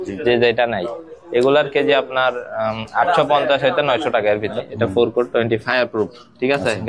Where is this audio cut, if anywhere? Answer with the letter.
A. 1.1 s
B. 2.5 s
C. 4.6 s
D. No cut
C